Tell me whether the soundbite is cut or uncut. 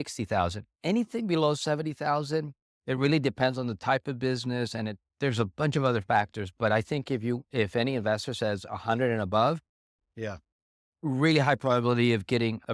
uncut